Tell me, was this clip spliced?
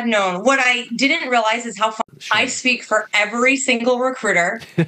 yes; 1 cut; at 2.0 s

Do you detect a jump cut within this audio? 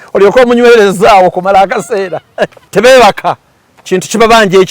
yes; 1 cut; at 2.6 s

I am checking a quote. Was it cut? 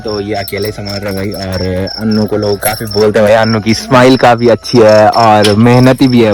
no; 0 cuts

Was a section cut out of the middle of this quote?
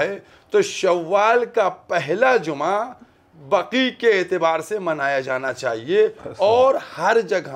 no; 0 cuts

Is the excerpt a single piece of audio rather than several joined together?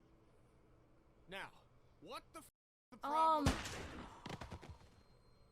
yes; 0 cuts

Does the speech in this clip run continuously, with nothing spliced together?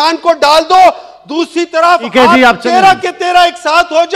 yes; 0 cuts

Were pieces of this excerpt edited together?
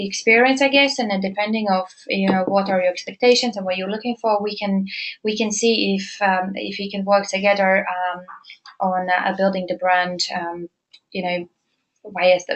yes; 1 cut; at 5.8 s

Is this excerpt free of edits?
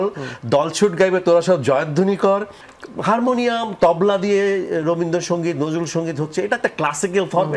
no; 1 cut; at 2.6 s

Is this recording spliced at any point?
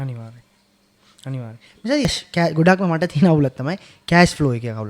yes; 1 cut; at 2.1 s

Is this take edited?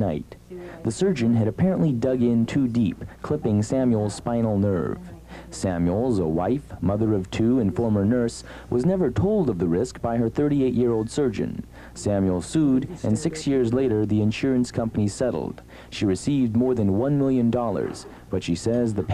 yes; 1 cut; at 11.1 s

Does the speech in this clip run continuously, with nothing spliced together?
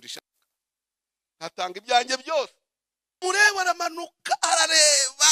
no; 1 cut; at 3.2 s

